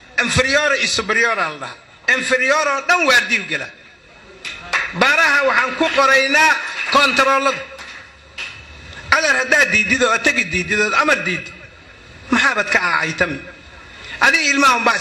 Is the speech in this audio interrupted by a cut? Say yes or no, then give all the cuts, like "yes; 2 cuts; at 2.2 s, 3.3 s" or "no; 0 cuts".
no; 0 cuts